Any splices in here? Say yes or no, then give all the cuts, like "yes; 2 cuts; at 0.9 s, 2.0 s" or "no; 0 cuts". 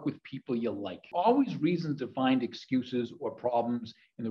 yes; 1 cut; at 1.1 s